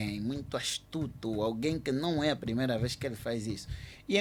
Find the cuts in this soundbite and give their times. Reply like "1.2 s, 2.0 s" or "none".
none